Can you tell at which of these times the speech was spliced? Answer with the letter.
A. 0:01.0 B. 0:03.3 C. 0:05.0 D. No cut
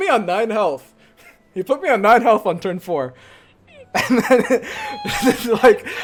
D